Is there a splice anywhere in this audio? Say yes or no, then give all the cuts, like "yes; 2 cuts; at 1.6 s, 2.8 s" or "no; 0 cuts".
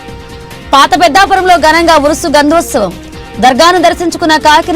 no; 0 cuts